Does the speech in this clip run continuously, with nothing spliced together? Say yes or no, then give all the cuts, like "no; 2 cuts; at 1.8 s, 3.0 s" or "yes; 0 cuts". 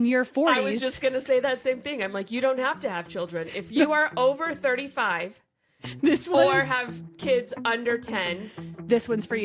yes; 0 cuts